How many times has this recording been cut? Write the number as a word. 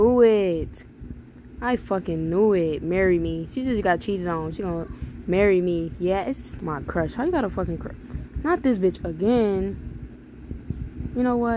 one